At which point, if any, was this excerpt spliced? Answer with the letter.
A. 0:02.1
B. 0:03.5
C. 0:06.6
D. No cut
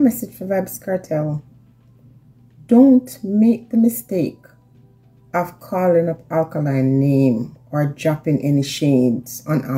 D